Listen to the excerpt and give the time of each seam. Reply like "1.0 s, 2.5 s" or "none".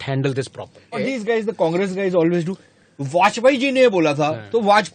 1.0 s